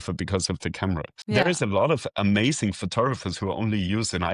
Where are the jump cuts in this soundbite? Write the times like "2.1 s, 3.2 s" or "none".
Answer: none